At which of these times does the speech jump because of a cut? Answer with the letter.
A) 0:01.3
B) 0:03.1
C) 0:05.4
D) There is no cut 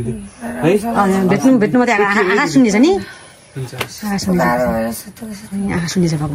D